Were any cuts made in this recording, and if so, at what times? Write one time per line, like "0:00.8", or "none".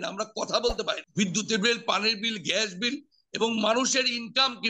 0:01.0